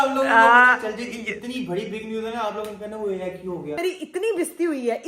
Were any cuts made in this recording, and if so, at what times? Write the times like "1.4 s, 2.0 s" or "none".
3.8 s